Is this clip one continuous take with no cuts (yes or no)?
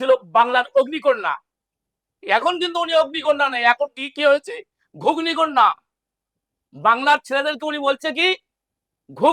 yes